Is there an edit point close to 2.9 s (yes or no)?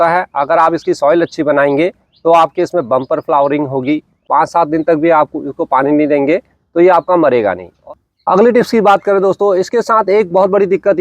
no